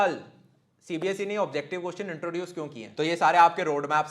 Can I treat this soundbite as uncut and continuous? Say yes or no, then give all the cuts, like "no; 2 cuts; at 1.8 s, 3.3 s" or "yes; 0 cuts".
no; 1 cut; at 2.8 s